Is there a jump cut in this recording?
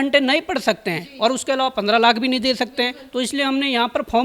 no; 0 cuts

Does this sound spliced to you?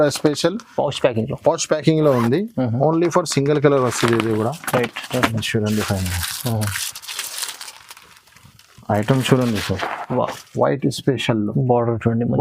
no; 0 cuts

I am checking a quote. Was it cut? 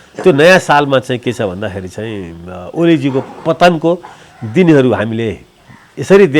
no; 0 cuts

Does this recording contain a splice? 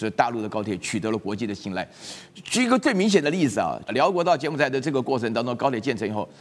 yes; 1 cut; at 3.8 s

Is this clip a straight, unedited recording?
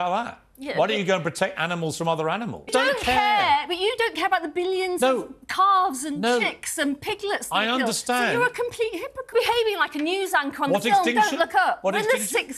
no; 2 cuts; at 2.7 s, 9.3 s

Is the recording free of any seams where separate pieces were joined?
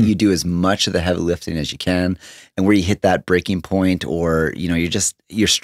yes; 0 cuts

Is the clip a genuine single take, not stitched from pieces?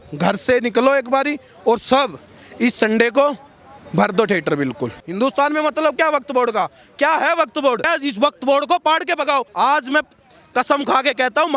no; 3 cuts; at 5.0 s, 7.9 s, 9.5 s

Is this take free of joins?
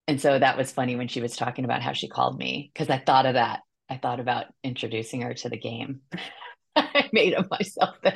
yes; 0 cuts

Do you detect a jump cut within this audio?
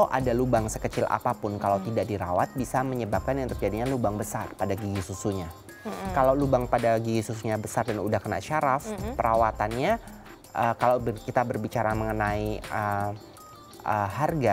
no; 0 cuts

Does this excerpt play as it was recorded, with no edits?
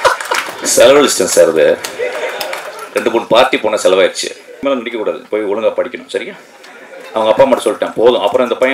no; 1 cut; at 4.6 s

